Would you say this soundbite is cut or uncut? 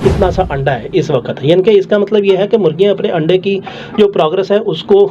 uncut